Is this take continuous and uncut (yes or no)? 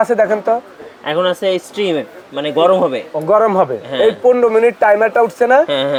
yes